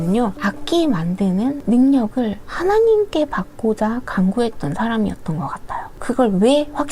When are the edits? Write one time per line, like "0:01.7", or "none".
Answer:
none